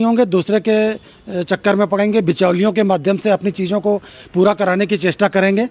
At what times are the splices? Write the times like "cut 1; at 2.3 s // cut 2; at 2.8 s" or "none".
none

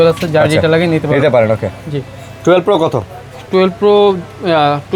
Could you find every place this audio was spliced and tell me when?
none

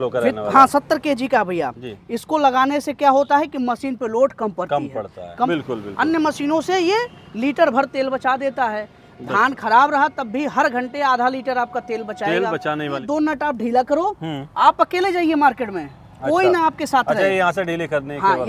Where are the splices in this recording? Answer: cut 1; at 5.5 s // cut 2; at 13.0 s

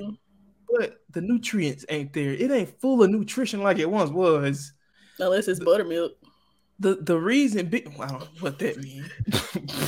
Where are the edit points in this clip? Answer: none

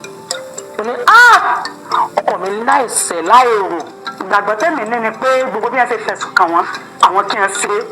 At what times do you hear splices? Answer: cut 1; at 4.0 s

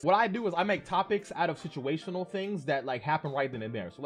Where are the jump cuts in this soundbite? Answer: none

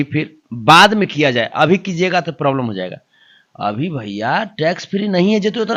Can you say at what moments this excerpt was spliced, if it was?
none

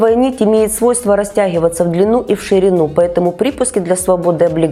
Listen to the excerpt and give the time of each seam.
none

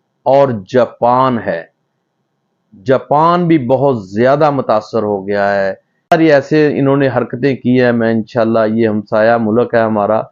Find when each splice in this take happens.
cut 1; at 6.1 s

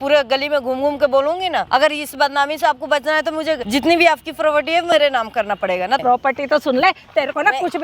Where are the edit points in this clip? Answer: cut 1; at 1.7 s // cut 2; at 3.6 s // cut 3; at 6.0 s

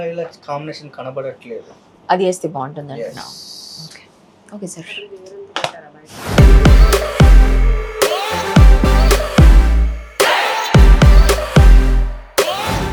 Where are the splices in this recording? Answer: none

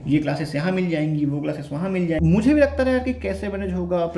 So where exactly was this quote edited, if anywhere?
cut 1; at 2.2 s

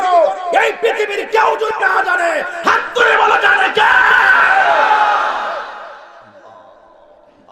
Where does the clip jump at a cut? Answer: none

